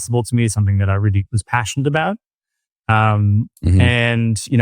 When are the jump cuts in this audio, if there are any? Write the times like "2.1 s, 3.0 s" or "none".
none